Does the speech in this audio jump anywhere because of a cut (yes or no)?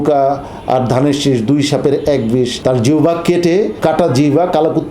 yes